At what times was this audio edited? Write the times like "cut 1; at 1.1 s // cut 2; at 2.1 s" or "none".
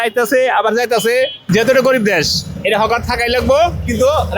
cut 1; at 1.4 s